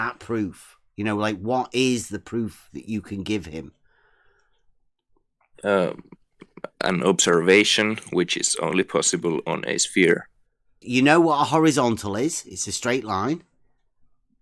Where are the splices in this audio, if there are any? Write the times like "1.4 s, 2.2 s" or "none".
10.8 s